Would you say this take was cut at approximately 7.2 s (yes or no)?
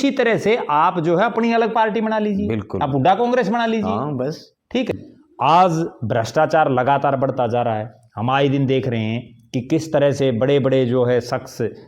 no